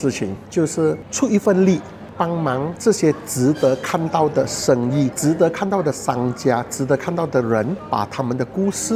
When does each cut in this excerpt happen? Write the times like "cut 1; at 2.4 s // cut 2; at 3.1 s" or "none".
none